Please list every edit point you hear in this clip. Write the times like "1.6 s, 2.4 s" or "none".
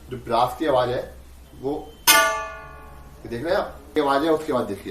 4.0 s